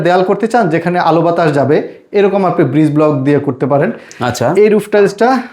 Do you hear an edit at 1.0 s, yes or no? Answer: no